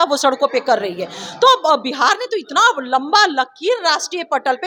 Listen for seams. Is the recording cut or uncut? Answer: uncut